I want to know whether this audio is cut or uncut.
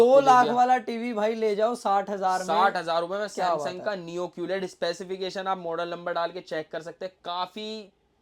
uncut